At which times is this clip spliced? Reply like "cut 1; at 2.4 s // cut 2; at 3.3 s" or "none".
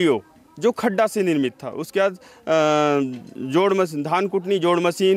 none

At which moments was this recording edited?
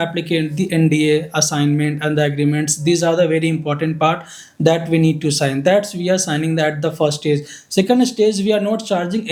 none

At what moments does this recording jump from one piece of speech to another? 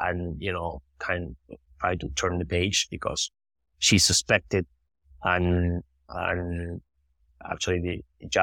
none

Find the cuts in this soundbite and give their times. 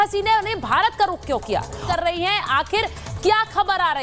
cut 1; at 1.8 s

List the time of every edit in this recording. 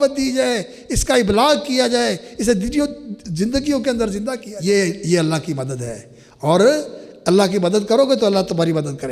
cut 1; at 4.5 s

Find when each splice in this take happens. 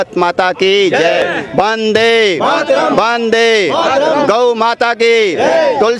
cut 1; at 1.2 s

